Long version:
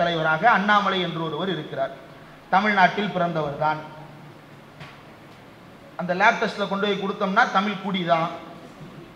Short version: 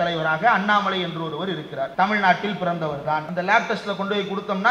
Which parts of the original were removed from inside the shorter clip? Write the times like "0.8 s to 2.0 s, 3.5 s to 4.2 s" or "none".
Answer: 1.9 s to 2.5 s, 3.8 s to 6.0 s